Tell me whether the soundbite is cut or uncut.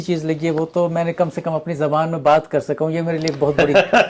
uncut